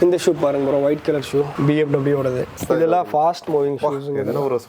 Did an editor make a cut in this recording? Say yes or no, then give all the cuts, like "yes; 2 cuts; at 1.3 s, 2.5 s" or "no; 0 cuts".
yes; 1 cut; at 2.6 s